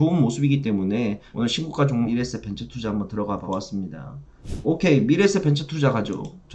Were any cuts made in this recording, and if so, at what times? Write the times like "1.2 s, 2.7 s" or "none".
4.4 s